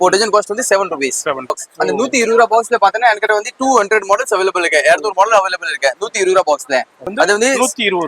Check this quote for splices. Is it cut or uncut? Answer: cut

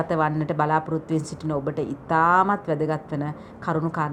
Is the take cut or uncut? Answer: uncut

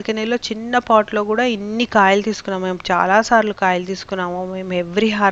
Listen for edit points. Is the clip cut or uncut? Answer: uncut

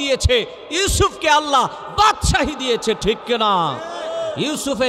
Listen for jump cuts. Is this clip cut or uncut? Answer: uncut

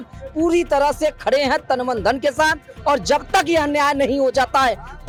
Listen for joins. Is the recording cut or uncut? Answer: uncut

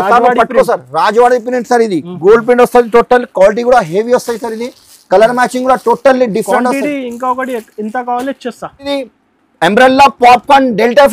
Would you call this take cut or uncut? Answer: cut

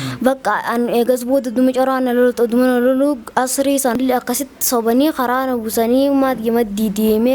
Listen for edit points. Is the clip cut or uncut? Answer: cut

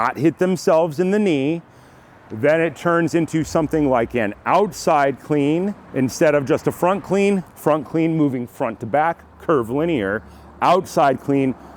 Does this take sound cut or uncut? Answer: cut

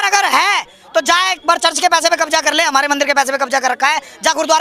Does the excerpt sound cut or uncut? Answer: uncut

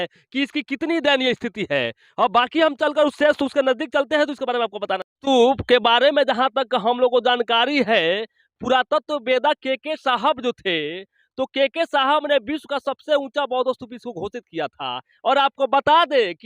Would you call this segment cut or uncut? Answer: uncut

